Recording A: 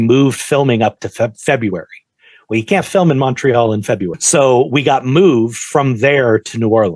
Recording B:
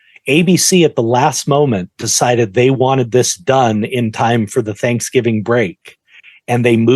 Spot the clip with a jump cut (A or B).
A